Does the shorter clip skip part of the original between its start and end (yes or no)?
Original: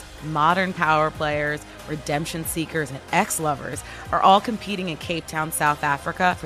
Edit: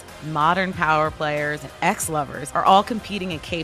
yes